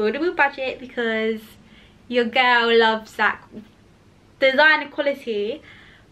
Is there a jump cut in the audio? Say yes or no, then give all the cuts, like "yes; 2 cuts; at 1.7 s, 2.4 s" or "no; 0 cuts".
no; 0 cuts